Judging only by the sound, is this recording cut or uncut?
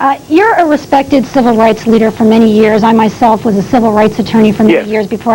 uncut